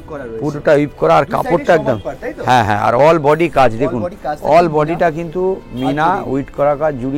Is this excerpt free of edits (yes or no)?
yes